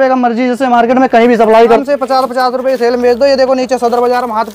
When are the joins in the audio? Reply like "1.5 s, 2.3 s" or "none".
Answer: 1.8 s